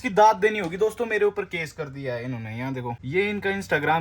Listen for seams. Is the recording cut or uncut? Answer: cut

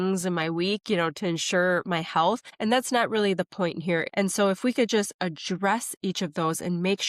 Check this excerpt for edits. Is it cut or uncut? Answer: cut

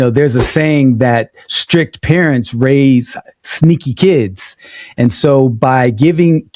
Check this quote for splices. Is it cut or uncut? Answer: uncut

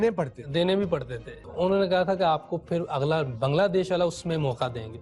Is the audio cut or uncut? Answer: cut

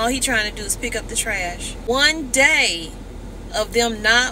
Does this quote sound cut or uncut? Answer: cut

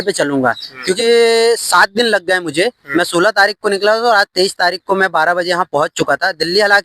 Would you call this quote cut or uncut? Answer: cut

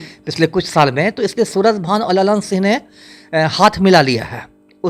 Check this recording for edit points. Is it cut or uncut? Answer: uncut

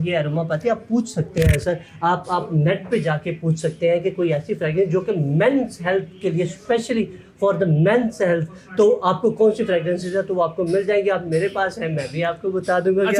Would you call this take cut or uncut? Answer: uncut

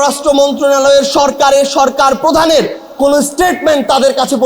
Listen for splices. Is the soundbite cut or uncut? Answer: uncut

